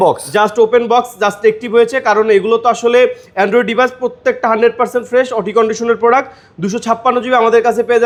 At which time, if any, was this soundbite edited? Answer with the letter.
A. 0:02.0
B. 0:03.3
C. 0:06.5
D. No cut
D